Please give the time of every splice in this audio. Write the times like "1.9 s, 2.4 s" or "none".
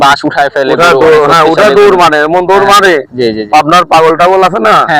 none